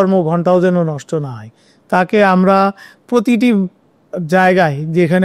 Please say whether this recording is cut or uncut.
uncut